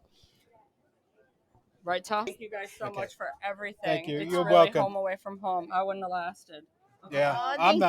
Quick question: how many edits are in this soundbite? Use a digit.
1